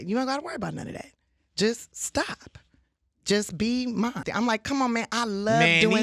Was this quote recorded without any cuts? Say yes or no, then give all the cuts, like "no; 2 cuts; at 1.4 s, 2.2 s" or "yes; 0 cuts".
no; 1 cut; at 4.3 s